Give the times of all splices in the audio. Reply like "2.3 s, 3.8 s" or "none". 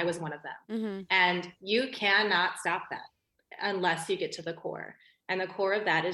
none